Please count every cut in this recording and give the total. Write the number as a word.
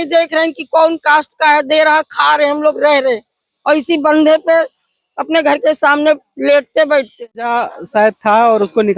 one